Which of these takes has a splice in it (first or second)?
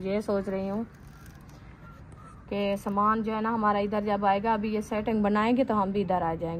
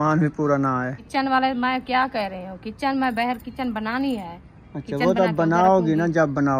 second